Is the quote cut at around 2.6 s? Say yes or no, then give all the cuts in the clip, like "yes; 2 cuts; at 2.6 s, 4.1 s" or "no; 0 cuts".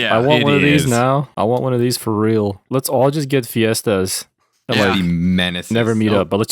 yes; 1 cut; at 2.6 s